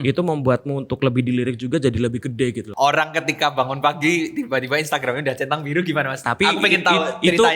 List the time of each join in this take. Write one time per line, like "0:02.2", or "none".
0:02.7